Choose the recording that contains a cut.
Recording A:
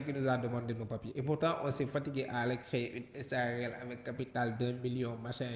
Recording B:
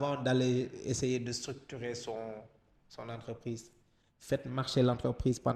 A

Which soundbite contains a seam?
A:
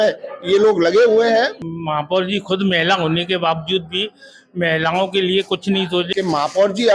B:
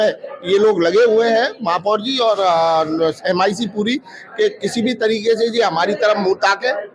A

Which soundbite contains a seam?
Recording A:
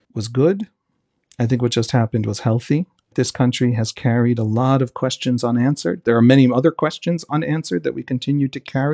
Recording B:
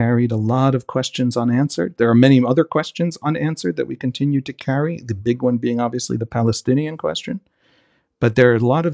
A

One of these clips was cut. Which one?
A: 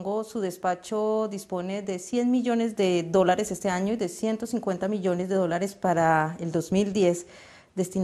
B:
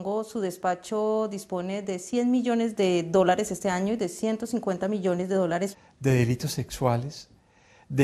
A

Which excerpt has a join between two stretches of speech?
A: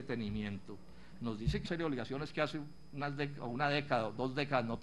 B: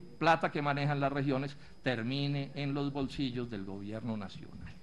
A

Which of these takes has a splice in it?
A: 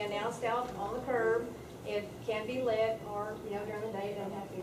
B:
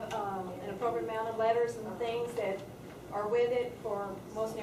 B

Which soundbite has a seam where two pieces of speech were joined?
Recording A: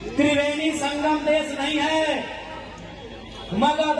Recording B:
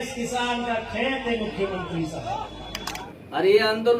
B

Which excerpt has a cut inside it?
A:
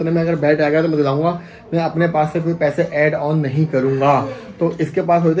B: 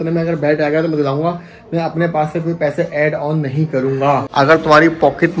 B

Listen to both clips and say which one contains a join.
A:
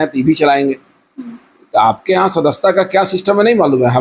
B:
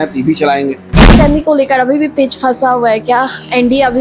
B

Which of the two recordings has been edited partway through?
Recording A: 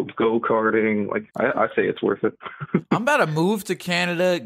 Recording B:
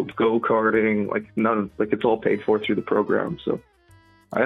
A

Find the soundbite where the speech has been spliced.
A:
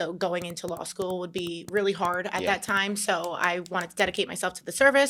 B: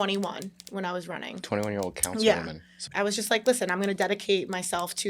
B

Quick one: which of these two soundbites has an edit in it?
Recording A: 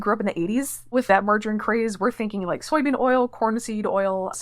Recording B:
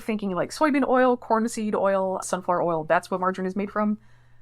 A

